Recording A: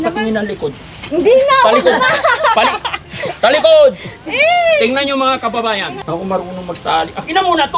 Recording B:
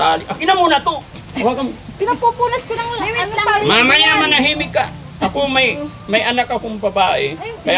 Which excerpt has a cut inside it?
A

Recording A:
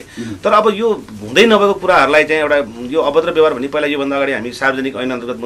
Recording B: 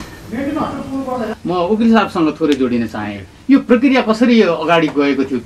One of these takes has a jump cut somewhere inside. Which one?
B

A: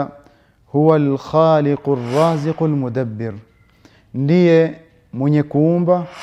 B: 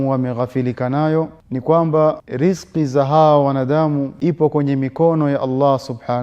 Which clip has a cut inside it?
B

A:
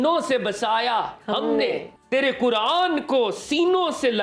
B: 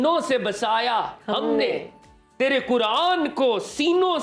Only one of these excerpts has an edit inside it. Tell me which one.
A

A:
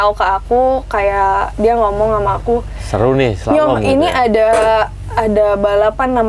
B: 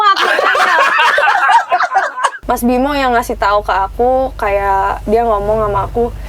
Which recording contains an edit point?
B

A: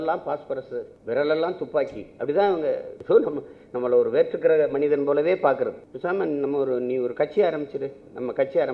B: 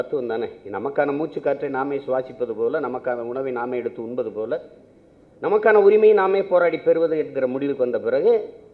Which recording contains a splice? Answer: A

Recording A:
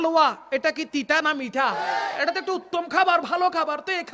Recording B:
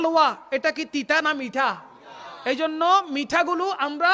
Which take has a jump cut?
A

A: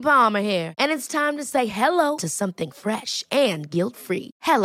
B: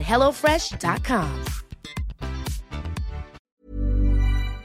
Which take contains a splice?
B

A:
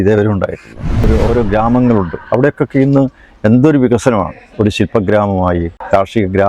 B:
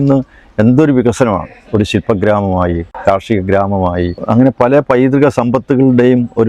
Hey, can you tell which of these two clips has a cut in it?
A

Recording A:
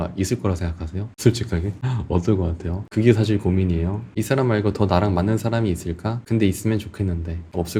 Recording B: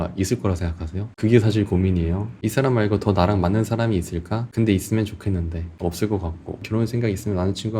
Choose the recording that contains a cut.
B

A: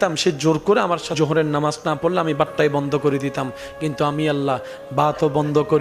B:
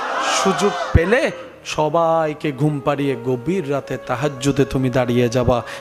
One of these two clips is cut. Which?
A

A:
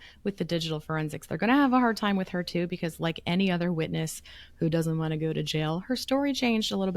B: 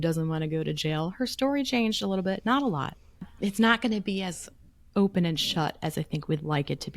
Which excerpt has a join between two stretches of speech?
B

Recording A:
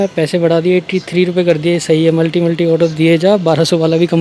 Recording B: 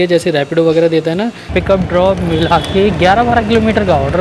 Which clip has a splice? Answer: B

